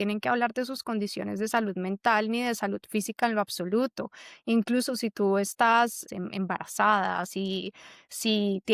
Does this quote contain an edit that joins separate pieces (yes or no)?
yes